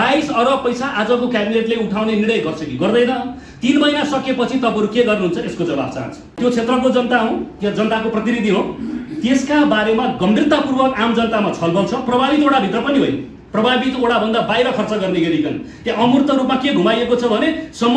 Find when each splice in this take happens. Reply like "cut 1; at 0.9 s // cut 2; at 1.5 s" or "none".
cut 1; at 6.4 s